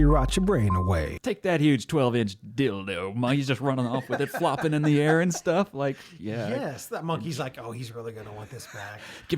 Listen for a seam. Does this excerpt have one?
yes; 1 cut; at 1.1 s

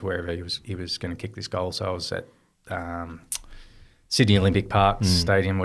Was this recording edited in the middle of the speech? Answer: no; 0 cuts

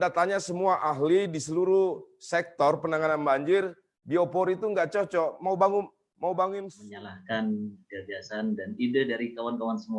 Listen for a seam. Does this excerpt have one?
yes; 1 cut; at 6.8 s

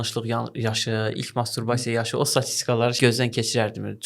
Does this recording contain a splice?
yes; 1 cut; at 3.0 s

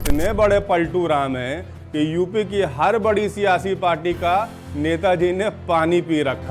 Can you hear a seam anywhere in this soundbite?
no; 0 cuts

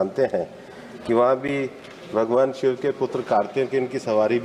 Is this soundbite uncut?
yes; 0 cuts

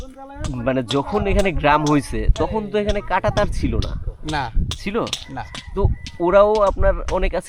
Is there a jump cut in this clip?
no; 0 cuts

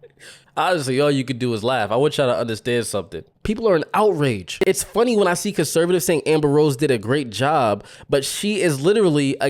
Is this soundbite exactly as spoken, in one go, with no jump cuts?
no; 2 cuts; at 3.3 s, 4.5 s

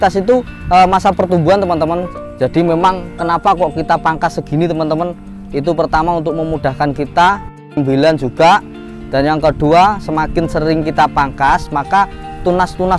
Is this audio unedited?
no; 1 cut; at 2.1 s

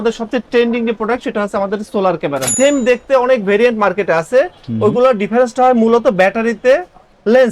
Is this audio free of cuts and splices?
no; 1 cut; at 2.5 s

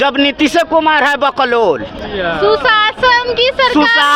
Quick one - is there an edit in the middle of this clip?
no; 0 cuts

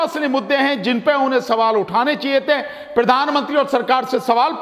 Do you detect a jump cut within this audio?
no; 0 cuts

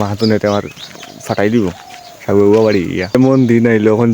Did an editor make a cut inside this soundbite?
yes; 1 cut; at 3.1 s

